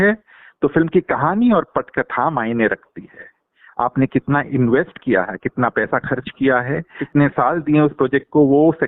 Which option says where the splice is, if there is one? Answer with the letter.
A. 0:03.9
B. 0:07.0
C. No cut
B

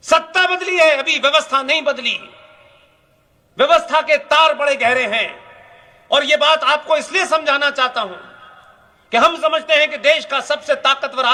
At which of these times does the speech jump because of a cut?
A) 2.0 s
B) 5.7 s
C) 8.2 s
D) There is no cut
D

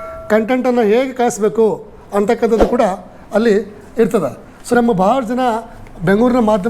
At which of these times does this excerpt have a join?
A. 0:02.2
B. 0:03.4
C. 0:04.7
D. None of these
C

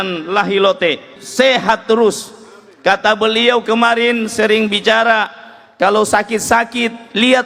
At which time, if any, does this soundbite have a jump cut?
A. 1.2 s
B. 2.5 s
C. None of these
A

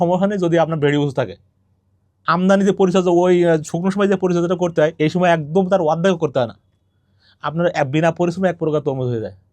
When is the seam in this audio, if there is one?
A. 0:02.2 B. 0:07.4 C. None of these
A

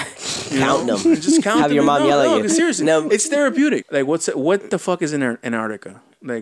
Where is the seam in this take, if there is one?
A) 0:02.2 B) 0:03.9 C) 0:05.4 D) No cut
B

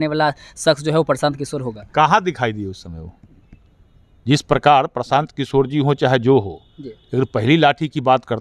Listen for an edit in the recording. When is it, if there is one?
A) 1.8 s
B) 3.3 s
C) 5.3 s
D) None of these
D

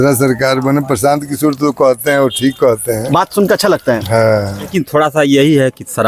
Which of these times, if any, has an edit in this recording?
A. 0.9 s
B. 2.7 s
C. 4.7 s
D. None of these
C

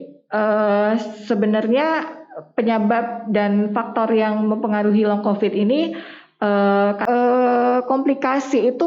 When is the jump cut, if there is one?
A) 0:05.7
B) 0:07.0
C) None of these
B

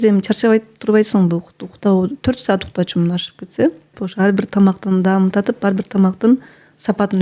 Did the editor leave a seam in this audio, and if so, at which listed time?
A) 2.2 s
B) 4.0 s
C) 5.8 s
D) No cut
B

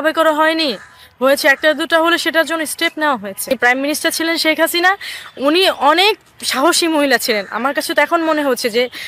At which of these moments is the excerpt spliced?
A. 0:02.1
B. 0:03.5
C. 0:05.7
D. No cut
B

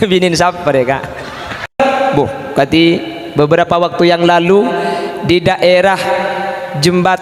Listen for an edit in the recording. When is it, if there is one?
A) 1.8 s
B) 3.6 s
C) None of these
A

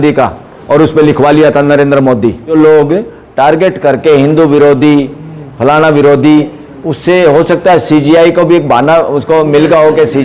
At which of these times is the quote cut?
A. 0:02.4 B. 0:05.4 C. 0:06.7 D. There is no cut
A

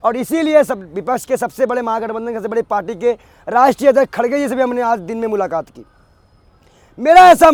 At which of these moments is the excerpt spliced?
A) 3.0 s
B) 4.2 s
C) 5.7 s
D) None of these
D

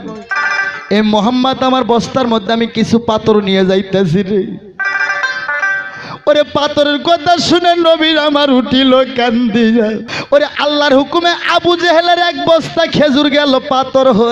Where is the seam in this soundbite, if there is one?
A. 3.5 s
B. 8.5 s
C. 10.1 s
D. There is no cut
C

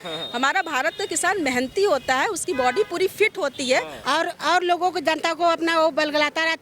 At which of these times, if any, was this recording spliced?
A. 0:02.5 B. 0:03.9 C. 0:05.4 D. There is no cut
B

